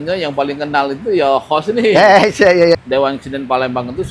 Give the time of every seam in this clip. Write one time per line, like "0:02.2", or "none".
0:02.7